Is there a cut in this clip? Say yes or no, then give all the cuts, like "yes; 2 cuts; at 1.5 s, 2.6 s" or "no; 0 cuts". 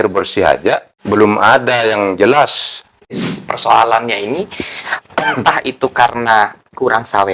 yes; 2 cuts; at 0.9 s, 3.3 s